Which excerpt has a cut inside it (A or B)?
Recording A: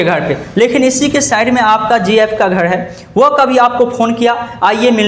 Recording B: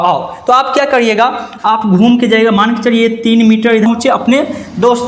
B